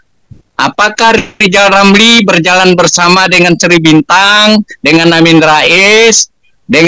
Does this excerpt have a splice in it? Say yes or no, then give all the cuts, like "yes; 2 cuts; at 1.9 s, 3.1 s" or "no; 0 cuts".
no; 0 cuts